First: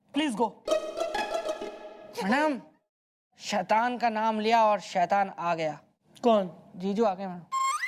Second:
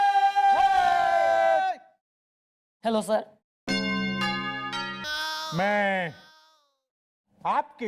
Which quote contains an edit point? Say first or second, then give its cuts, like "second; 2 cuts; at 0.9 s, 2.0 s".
second; 1 cut; at 5.0 s